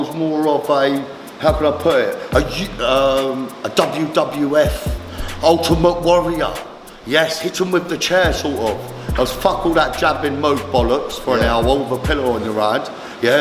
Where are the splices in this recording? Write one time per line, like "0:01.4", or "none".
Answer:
none